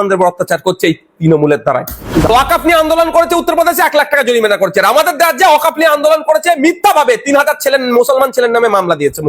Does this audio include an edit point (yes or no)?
yes